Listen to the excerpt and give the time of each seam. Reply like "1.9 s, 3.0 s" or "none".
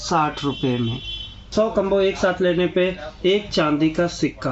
1.5 s